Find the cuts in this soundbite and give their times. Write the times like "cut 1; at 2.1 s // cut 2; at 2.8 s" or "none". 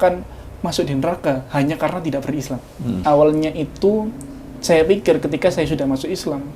cut 1; at 3.0 s